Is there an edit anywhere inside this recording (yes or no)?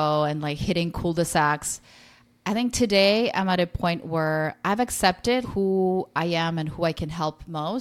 yes